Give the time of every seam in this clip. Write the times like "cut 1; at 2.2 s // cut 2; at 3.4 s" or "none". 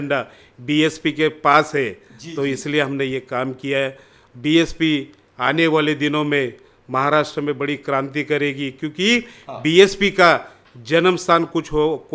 cut 1; at 4.2 s

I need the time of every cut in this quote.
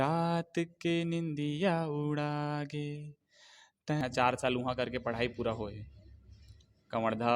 cut 1; at 4.0 s

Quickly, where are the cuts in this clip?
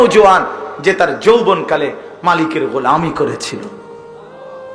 cut 1; at 3.9 s

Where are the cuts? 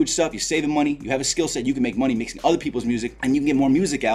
none

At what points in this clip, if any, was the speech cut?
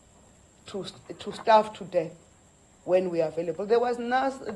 none

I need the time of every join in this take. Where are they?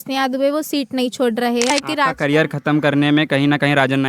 cut 1; at 1.7 s

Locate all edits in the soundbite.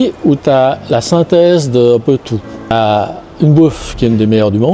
cut 1; at 2.7 s

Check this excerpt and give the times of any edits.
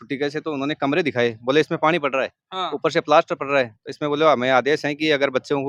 none

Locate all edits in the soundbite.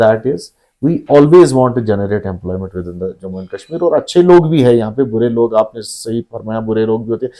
none

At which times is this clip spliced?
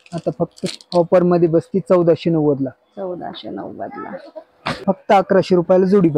cut 1; at 4.8 s

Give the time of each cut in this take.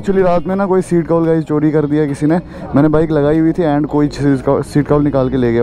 none

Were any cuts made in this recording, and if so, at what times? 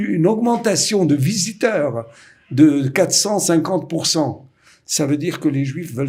none

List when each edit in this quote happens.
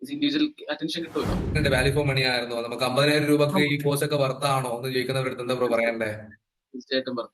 cut 1; at 1.5 s

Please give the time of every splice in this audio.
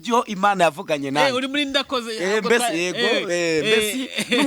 none

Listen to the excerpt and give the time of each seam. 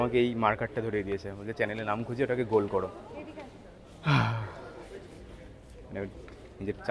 none

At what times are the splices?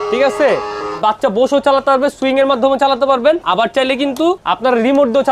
cut 1; at 1.0 s // cut 2; at 3.4 s // cut 3; at 4.4 s

